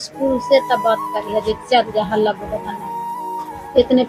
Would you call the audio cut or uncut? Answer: uncut